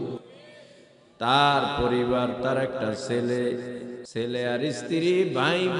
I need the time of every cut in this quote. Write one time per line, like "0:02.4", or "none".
0:04.0